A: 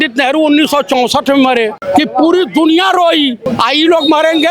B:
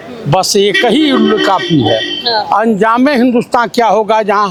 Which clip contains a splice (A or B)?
A